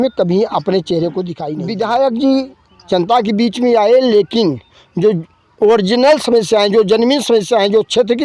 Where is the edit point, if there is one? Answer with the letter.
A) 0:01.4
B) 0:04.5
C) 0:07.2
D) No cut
A